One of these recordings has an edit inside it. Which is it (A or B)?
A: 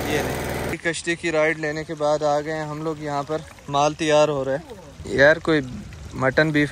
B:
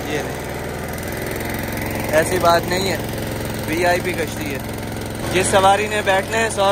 A